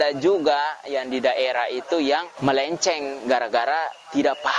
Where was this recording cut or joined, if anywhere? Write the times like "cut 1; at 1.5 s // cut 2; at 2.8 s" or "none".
cut 1; at 2.3 s